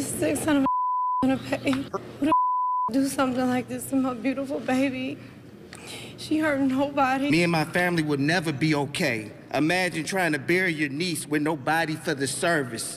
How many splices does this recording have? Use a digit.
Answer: 2